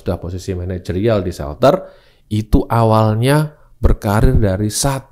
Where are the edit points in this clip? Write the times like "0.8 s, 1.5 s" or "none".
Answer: none